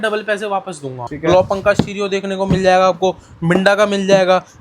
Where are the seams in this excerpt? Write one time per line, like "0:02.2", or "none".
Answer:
0:01.1